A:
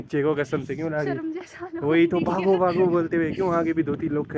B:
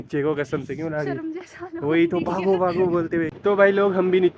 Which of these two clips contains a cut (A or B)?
B